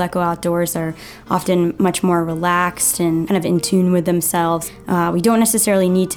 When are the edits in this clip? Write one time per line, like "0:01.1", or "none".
0:03.3
0:04.6